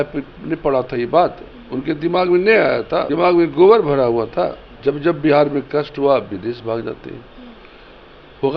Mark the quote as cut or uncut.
cut